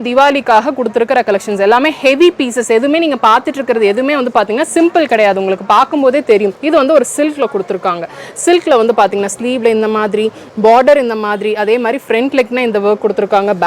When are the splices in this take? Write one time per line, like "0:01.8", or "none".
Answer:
0:06.6